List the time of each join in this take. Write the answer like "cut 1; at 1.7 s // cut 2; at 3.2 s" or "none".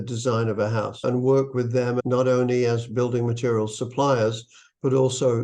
cut 1; at 0.9 s // cut 2; at 2.0 s